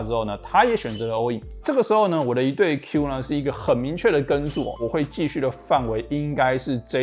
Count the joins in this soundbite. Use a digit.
1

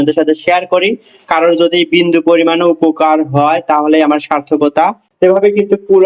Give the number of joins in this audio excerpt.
1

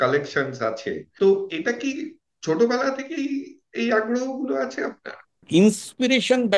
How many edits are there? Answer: 2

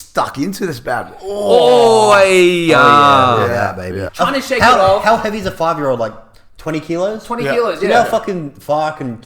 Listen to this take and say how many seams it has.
1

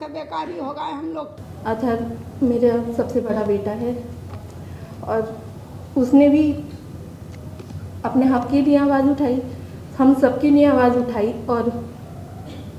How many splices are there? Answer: 1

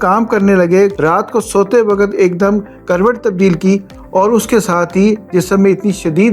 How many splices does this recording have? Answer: 1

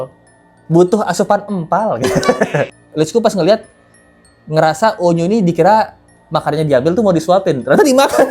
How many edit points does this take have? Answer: 1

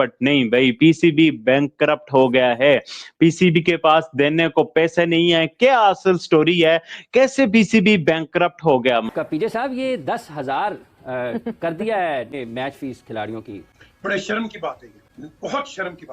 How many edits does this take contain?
2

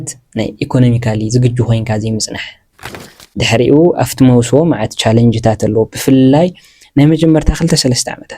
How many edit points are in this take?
1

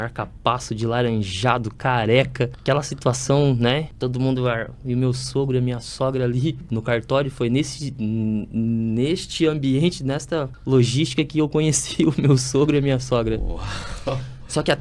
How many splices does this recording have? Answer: 4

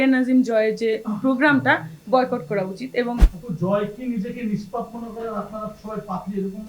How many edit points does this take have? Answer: 1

